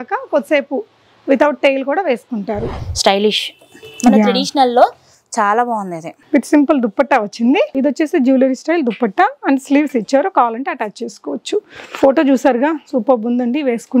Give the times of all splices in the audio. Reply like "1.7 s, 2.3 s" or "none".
2.9 s, 7.8 s